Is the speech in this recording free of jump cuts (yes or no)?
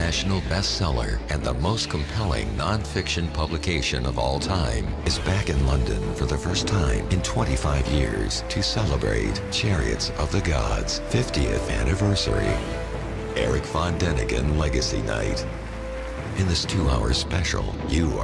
yes